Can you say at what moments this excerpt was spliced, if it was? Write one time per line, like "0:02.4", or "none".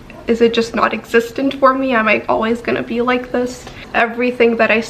0:03.9